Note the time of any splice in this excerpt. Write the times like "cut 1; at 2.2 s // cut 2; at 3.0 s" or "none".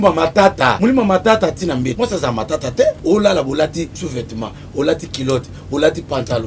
cut 1; at 0.8 s // cut 2; at 1.9 s // cut 3; at 3.0 s // cut 4; at 4.0 s